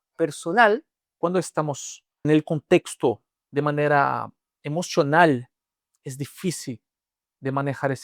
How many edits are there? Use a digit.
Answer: 2